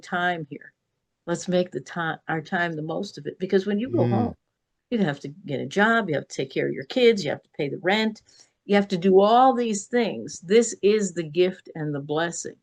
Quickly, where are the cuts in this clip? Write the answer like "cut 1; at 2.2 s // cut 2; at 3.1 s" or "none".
none